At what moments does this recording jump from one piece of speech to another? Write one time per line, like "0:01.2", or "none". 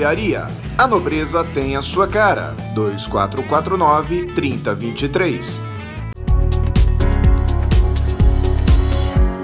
0:06.1